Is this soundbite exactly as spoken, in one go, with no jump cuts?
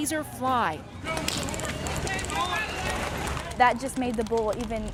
yes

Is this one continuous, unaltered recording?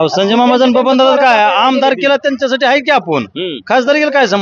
yes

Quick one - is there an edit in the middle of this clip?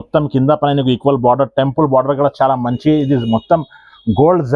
no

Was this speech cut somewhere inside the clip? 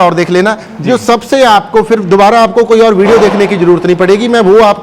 no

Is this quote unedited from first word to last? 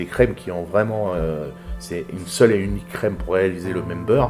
yes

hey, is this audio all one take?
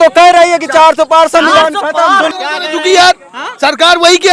no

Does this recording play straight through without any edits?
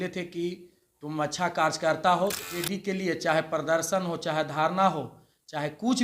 no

